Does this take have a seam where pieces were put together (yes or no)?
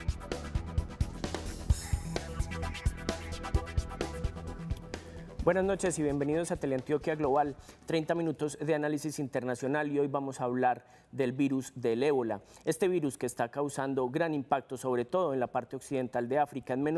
no